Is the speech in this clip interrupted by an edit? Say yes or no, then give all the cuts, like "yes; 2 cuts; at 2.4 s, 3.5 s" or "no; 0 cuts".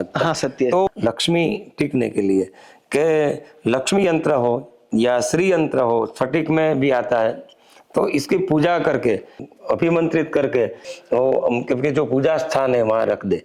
yes; 3 cuts; at 0.9 s, 9.5 s, 10.9 s